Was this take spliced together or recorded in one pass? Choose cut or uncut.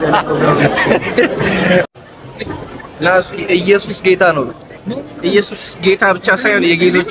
cut